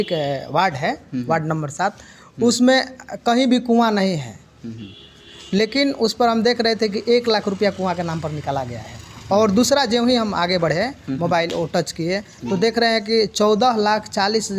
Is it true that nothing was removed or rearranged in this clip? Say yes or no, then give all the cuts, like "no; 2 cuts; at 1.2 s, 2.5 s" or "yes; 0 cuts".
yes; 0 cuts